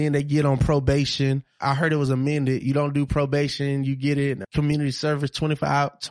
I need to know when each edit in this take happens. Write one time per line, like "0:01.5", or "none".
0:01.7
0:04.4